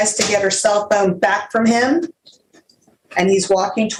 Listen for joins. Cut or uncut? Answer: uncut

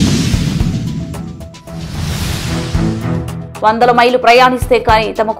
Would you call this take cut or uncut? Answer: cut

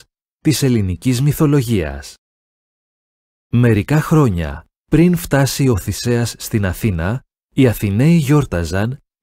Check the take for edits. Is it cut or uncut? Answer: uncut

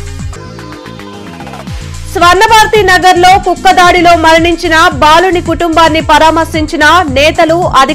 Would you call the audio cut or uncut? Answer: cut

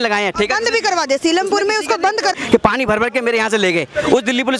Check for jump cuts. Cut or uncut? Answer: cut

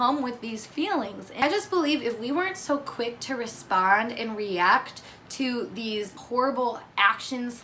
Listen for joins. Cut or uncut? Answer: cut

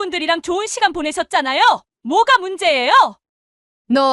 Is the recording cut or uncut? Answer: cut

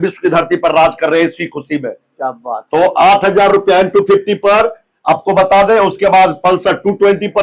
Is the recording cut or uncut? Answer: uncut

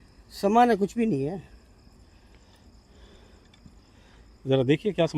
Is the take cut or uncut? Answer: uncut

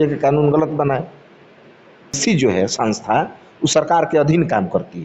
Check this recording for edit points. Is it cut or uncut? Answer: cut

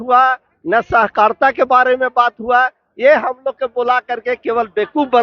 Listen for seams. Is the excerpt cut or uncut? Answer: uncut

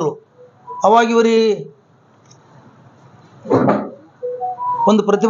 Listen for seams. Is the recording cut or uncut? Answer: uncut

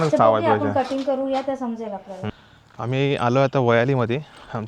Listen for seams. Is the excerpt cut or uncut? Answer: cut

